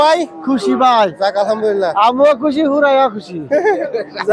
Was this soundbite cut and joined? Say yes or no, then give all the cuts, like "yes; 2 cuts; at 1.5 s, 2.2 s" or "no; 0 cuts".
no; 0 cuts